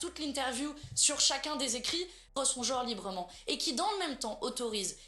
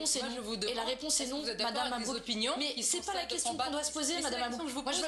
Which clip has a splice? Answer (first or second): first